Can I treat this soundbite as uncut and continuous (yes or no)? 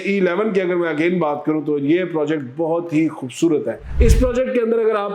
no